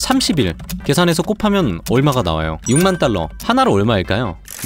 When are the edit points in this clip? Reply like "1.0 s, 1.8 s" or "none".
2.5 s